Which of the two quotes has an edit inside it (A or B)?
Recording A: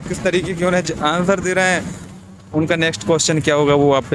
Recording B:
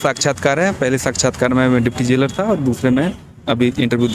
A